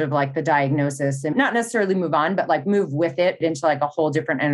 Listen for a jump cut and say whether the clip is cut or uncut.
cut